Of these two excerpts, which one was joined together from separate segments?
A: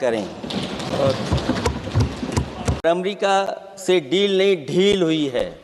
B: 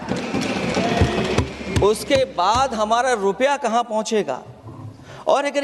A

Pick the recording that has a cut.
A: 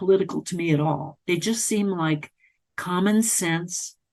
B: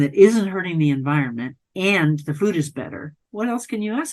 B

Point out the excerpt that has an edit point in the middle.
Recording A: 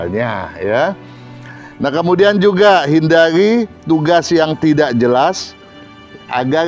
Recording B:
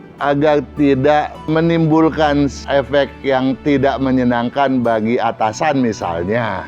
B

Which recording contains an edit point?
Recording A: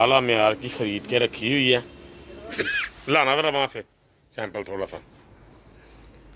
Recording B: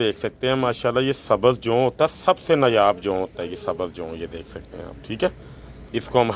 A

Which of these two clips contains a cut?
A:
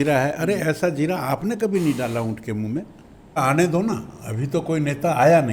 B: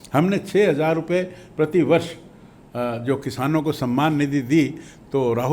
A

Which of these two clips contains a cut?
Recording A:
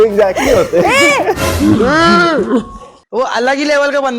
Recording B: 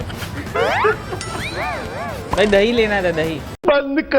B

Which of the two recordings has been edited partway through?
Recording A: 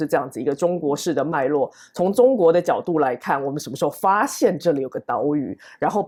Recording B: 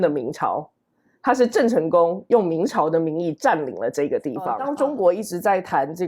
B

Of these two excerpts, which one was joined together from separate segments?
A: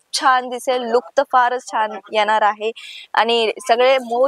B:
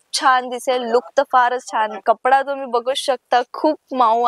B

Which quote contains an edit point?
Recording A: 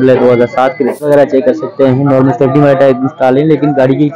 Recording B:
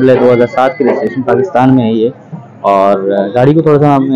A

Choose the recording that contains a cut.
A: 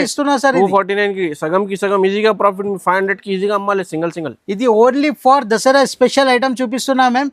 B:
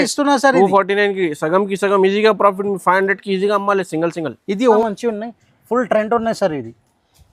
B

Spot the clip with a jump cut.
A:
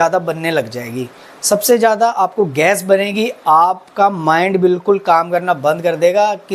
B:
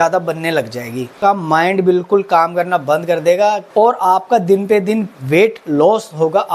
B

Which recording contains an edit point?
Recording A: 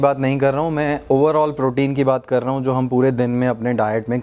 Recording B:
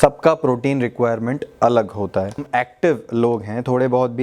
B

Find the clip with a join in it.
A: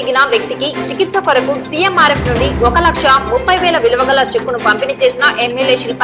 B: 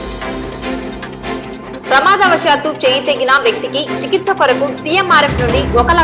B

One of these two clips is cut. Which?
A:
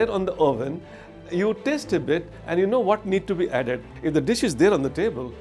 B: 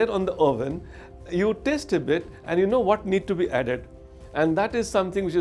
A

